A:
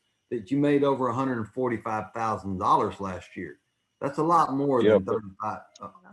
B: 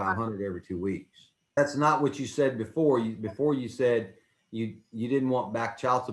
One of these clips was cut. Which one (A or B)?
B